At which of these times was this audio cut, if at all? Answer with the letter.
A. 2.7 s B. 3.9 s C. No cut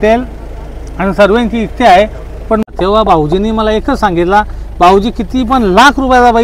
A